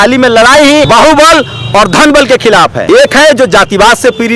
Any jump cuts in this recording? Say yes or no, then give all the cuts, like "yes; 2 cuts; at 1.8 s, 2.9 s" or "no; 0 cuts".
yes; 2 cuts; at 0.9 s, 2.8 s